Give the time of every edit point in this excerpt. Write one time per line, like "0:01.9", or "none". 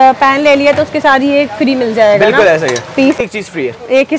0:03.2